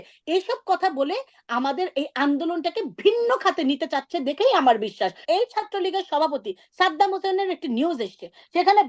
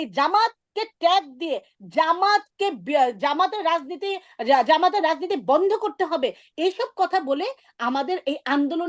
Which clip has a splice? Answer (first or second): first